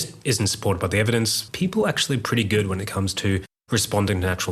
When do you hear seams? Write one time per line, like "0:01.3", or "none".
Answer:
0:01.4